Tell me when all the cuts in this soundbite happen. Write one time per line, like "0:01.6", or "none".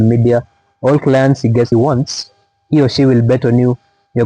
0:01.7